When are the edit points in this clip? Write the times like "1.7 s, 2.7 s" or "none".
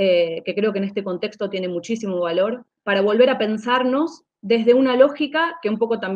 2.7 s